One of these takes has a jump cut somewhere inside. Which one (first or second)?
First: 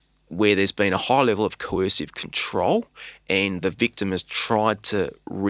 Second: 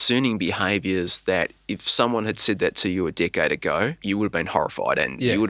second